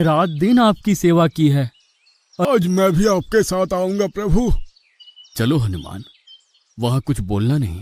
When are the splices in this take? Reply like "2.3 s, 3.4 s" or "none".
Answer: 2.4 s

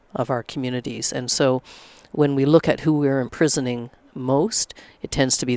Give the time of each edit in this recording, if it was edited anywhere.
none

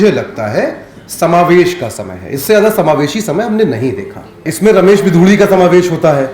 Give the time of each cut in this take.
4.4 s

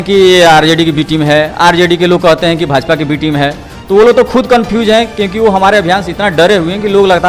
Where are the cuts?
none

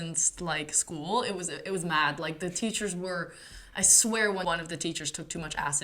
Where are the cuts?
4.4 s

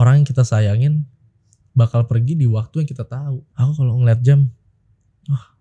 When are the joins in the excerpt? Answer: 3.4 s

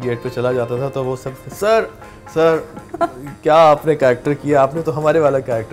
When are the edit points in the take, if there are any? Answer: none

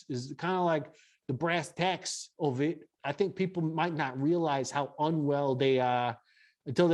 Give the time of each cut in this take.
2.9 s

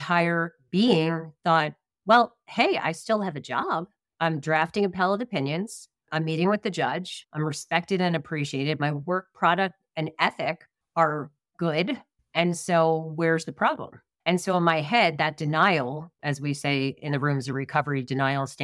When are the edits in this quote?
4.0 s, 7.1 s, 14.1 s

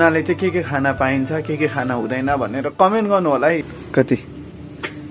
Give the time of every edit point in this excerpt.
3.6 s

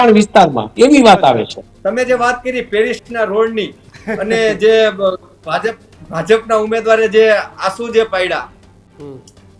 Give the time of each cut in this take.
1.6 s

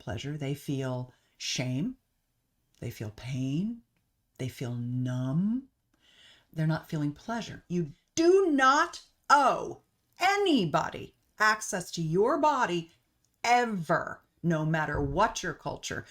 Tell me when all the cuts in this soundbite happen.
7.6 s

